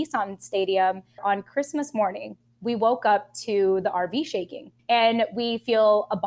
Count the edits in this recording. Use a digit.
1